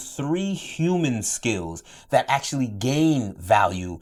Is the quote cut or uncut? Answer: uncut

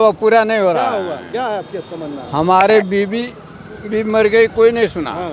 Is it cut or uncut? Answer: uncut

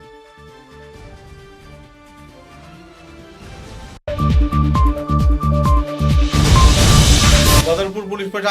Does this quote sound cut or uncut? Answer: cut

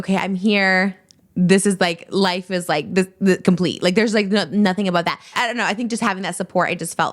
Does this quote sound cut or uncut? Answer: cut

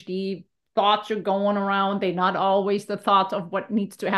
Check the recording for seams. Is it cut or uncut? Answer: uncut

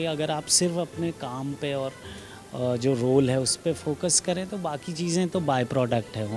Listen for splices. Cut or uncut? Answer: uncut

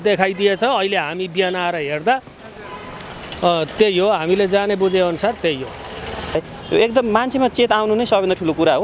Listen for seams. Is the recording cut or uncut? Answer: cut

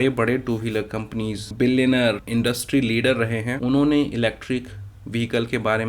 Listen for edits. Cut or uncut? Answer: cut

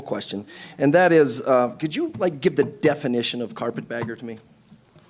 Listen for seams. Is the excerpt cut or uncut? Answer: uncut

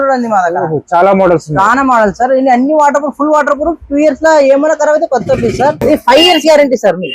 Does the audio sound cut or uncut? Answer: cut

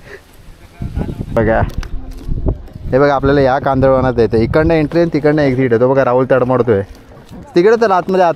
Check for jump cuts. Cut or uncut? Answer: cut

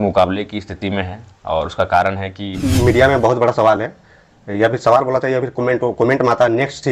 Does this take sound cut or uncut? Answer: cut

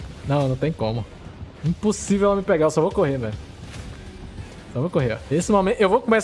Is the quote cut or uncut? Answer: cut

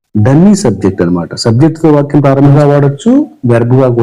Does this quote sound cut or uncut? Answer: cut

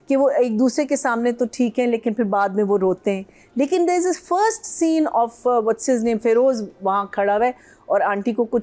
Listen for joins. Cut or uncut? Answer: uncut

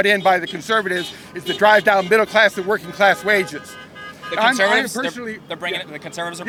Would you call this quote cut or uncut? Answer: uncut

